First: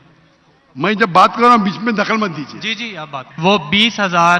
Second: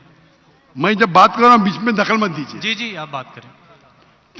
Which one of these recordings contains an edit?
first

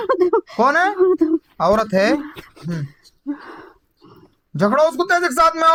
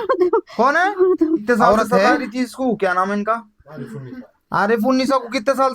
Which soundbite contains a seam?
second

